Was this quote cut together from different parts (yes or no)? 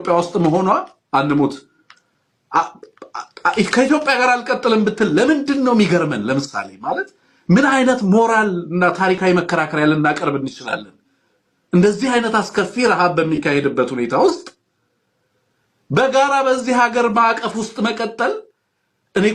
no